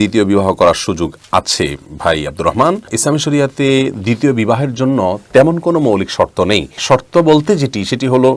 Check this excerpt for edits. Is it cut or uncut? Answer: uncut